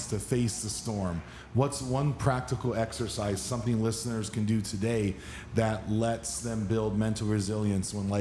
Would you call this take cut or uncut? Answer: uncut